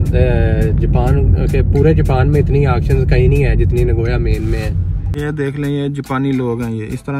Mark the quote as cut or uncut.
cut